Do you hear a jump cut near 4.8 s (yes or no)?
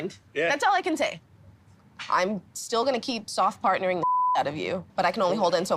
yes